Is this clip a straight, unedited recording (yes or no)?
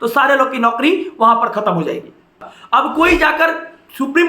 no